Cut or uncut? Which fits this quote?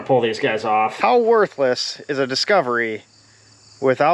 cut